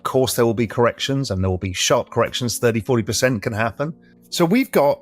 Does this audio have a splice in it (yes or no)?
yes